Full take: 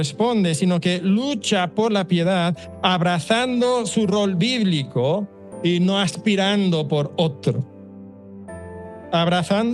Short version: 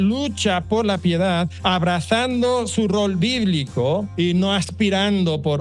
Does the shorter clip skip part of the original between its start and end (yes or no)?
yes